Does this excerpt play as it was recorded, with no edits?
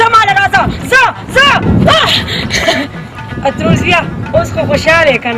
yes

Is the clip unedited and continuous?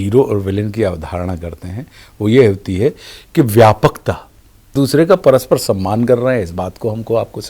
no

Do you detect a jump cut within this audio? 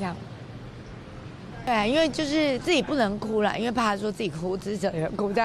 yes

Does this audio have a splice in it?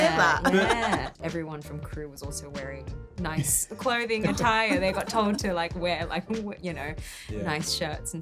yes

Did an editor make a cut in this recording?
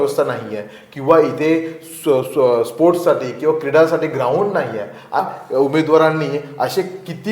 yes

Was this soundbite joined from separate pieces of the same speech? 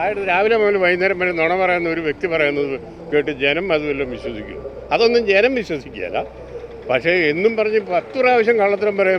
no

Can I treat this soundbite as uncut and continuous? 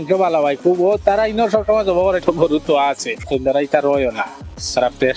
no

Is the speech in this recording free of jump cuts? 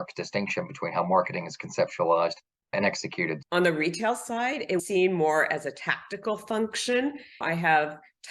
no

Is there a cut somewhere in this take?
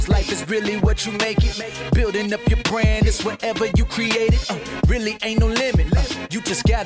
no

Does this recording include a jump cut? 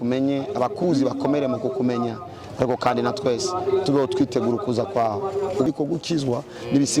yes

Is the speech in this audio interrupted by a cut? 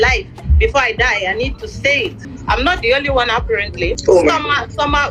yes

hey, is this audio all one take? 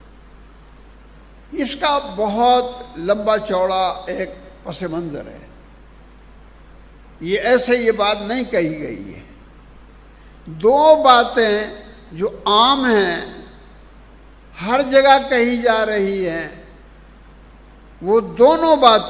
yes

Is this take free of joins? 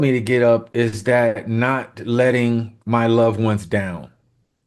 yes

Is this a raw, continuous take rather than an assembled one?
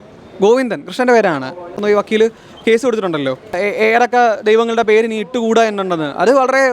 no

